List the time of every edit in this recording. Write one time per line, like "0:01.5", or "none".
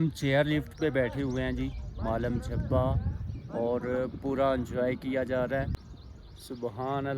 0:05.7